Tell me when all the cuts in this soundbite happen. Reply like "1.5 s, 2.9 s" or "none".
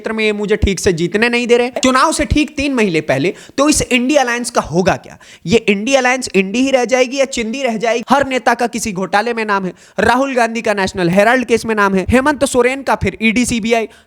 1.8 s, 8.0 s, 12.1 s